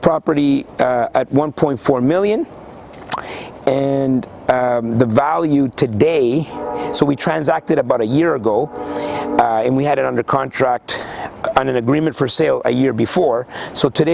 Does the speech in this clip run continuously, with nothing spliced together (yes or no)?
yes